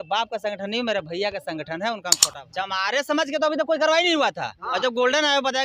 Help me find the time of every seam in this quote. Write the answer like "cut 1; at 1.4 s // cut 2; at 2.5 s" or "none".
cut 1; at 2.2 s